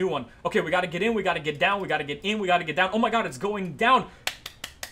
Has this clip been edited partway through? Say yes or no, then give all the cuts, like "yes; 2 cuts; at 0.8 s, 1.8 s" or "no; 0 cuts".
no; 0 cuts